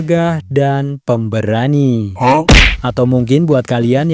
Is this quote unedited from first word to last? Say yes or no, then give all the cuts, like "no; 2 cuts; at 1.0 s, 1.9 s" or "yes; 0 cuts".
no; 1 cut; at 2.4 s